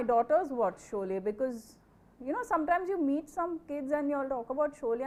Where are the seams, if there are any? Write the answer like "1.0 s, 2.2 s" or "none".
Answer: none